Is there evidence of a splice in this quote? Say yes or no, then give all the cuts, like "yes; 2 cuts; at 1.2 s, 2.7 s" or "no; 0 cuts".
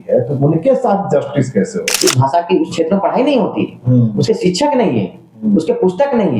yes; 1 cut; at 1.9 s